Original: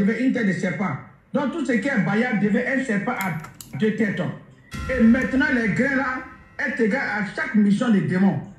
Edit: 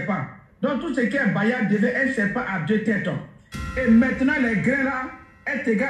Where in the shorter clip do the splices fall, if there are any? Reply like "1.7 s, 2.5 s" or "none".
2.6 s